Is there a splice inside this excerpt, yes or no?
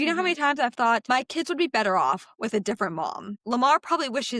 yes